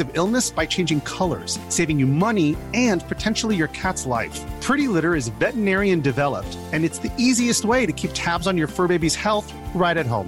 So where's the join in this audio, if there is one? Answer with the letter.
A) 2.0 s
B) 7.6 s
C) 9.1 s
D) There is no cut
D